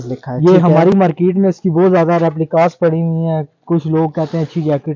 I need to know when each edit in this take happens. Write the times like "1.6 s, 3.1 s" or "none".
none